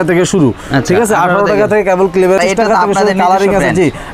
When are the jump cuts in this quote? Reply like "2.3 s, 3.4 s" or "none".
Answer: 2.4 s